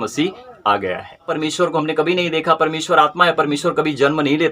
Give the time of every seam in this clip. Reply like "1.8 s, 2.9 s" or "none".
1.3 s